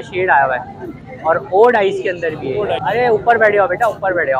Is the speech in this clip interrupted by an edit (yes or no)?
yes